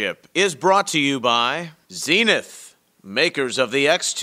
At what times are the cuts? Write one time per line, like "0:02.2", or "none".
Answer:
0:01.7